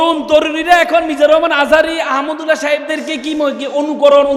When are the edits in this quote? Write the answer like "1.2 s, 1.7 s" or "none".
none